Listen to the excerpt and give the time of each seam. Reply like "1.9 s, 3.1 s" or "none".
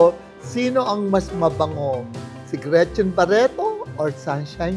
none